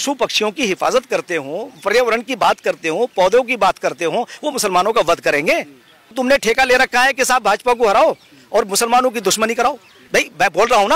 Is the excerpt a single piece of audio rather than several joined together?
no; 2 cuts; at 6.2 s, 9.9 s

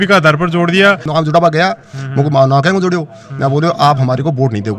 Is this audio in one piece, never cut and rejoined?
no; 1 cut; at 1.0 s

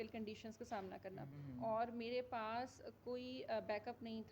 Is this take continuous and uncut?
no; 1 cut; at 1.3 s

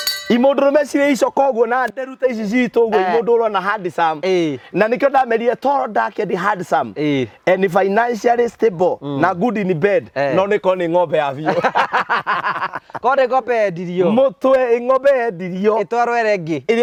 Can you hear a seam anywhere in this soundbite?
no; 0 cuts

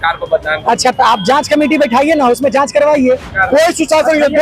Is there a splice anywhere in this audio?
yes; 1 cut; at 3.3 s

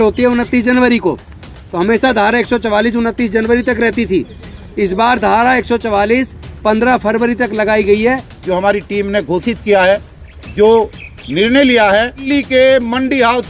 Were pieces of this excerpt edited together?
yes; 2 cuts; at 8.3 s, 12.2 s

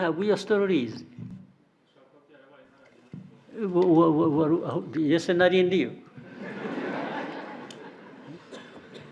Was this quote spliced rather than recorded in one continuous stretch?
yes; 1 cut; at 1.3 s

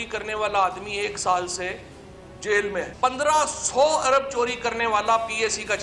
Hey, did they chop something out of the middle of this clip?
yes; 1 cut; at 2.9 s

